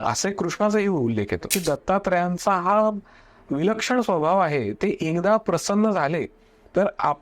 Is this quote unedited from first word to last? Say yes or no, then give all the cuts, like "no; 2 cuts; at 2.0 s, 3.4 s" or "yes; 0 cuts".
no; 1 cut; at 1.6 s